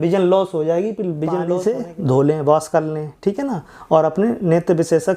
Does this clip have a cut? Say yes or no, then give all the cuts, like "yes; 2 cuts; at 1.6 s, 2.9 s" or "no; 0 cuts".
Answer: yes; 1 cut; at 1.6 s